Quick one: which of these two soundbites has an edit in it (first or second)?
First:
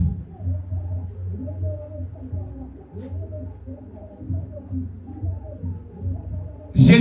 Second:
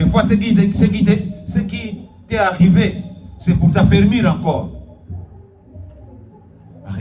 second